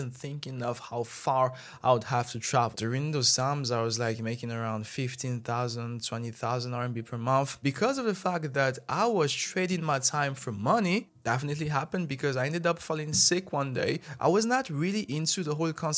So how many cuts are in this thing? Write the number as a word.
four